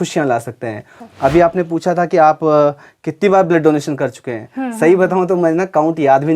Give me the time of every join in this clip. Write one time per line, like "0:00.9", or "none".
0:00.9